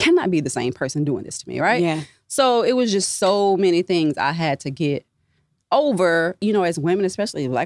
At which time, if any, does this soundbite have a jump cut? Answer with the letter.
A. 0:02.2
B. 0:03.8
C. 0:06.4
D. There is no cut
C